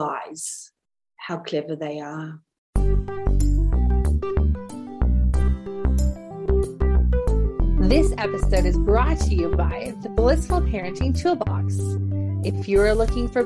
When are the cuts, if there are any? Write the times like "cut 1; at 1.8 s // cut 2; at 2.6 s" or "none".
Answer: cut 1; at 2.6 s